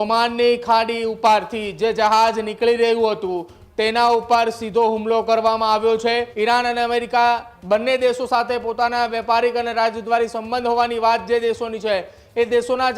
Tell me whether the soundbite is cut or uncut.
cut